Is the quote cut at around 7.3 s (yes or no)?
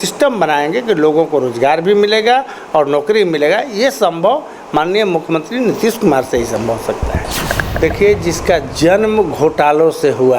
yes